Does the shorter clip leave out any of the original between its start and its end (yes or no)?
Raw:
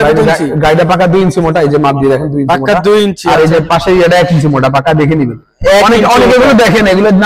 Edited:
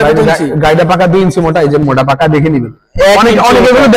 yes